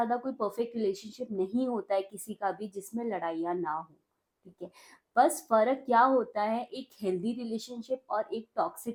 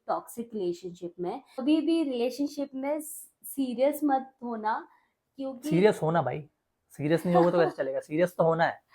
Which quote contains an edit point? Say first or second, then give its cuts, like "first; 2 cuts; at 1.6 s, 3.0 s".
second; 1 cut; at 1.6 s